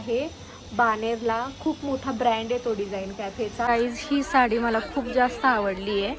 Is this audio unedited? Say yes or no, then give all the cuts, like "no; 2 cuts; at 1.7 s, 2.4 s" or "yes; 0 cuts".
no; 1 cut; at 3.7 s